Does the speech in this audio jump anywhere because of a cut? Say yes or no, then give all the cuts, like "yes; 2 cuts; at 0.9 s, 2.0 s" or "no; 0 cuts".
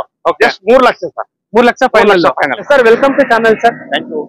yes; 1 cut; at 2.6 s